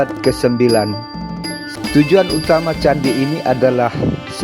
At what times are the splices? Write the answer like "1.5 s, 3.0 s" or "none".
1.6 s

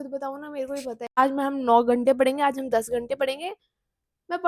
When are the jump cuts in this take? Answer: 1.2 s

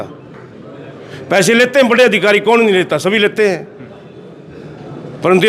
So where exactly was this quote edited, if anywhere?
none

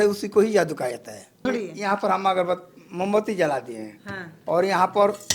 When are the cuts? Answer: 1.4 s

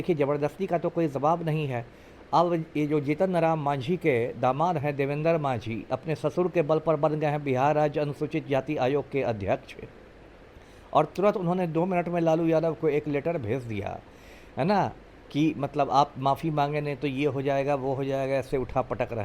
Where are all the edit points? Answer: none

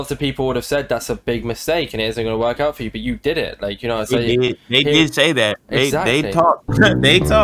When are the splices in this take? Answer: none

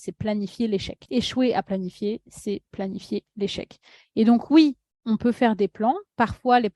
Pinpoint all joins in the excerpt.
none

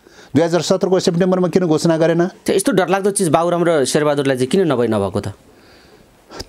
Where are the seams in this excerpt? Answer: 2.4 s

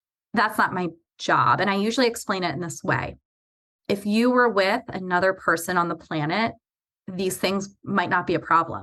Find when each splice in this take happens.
none

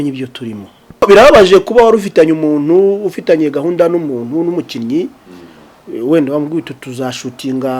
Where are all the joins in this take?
1.0 s

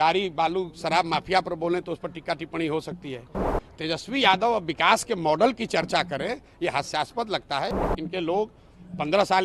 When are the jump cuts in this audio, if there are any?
3.5 s, 7.8 s

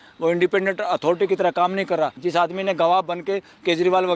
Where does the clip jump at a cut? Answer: 2.2 s

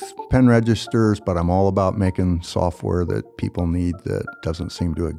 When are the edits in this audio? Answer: none

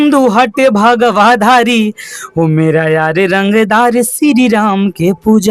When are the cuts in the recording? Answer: none

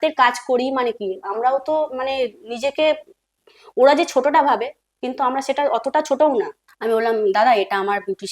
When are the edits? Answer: 6.6 s

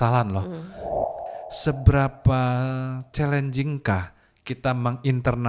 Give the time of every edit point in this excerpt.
1.1 s

